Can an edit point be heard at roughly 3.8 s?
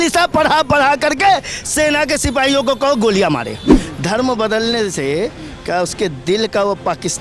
yes; 1 cut; at 3.8 s

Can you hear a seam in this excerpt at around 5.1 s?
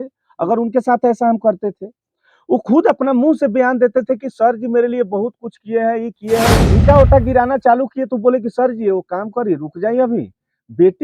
no; 1 cut; at 6.7 s

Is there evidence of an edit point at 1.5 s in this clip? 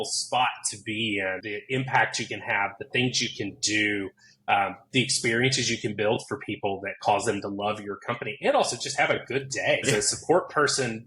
yes; 2 cuts; at 1.5 s, 9.8 s

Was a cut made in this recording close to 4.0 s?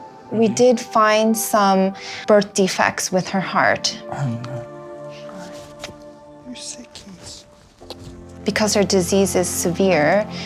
no; 0 cuts

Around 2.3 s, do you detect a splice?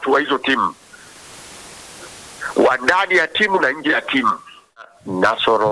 no; 1 cut; at 4.8 s

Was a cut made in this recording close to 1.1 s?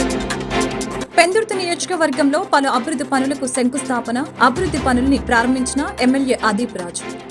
yes; 1 cut; at 1.1 s

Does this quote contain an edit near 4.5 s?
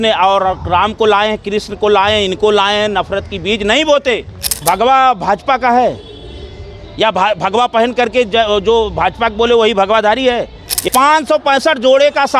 yes; 2 cuts; at 4.5 s, 10.8 s

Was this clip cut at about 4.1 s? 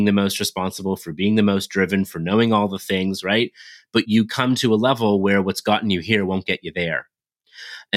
yes; 1 cut; at 4.1 s

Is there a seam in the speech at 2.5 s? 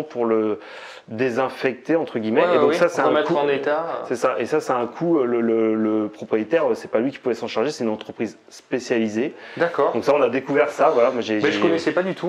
no; 0 cuts

